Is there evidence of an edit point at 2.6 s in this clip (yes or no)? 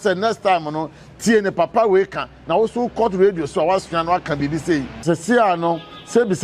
no